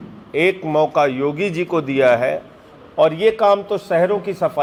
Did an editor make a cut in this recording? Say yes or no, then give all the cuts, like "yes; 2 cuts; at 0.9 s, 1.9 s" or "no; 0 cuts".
no; 0 cuts